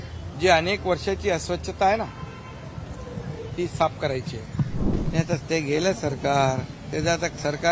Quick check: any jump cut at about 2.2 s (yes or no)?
no